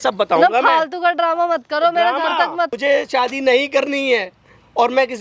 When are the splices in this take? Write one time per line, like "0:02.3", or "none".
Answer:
0:02.7